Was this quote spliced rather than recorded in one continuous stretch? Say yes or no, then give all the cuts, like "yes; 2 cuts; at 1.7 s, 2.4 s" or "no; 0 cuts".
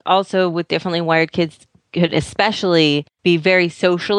yes; 1 cut; at 3.1 s